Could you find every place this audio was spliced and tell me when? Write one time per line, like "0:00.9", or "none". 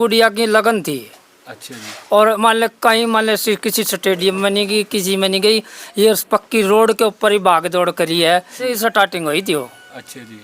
0:08.7